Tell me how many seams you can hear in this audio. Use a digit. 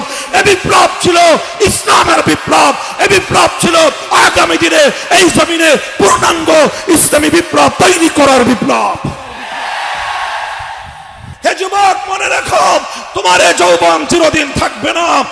1